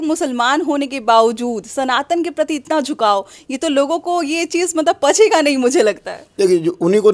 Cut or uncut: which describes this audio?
uncut